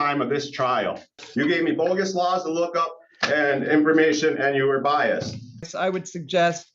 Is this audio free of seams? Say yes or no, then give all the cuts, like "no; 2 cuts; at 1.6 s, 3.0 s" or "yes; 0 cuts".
no; 2 cuts; at 1.2 s, 5.7 s